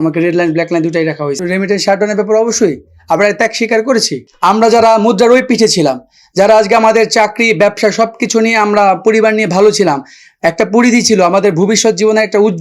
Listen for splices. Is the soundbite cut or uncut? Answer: cut